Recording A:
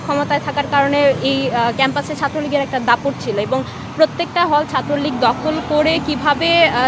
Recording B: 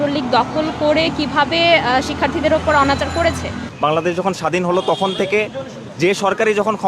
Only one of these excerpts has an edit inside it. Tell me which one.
B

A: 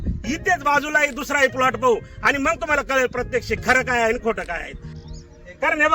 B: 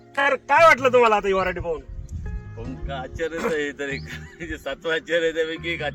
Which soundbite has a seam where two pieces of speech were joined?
A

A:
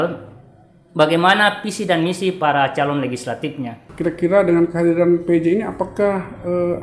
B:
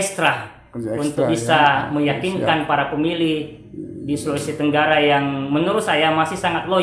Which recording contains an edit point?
A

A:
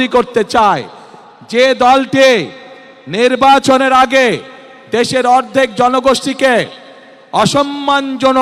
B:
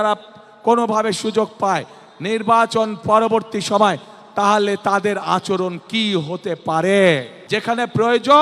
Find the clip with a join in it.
B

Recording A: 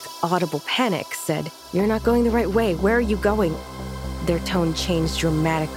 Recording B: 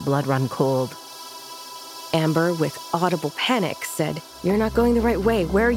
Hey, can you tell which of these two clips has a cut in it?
B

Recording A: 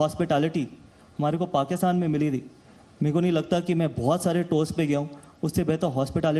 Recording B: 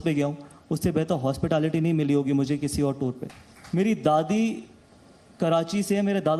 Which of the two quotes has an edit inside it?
B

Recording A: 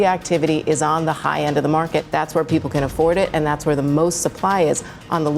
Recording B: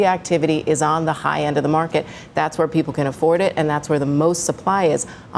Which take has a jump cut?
A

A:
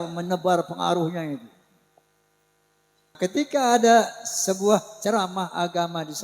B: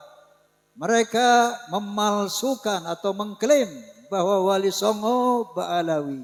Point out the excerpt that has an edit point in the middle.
A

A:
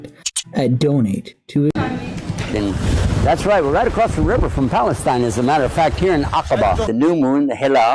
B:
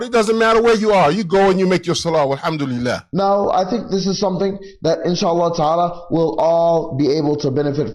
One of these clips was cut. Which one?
A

